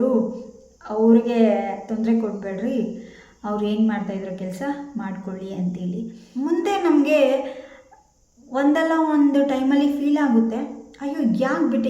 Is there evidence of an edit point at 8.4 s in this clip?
no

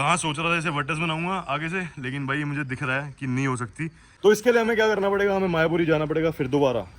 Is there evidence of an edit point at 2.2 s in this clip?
no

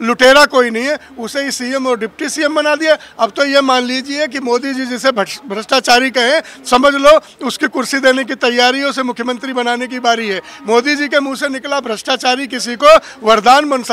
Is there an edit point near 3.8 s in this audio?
no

